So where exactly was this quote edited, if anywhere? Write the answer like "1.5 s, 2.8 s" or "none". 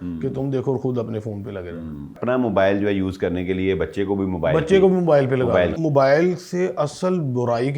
2.2 s, 5.7 s